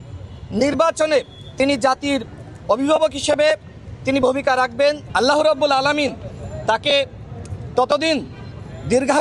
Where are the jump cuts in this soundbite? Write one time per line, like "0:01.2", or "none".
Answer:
0:05.0